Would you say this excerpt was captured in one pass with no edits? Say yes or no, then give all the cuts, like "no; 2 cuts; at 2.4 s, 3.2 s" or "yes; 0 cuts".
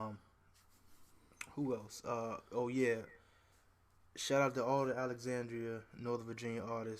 no; 1 cut; at 3.6 s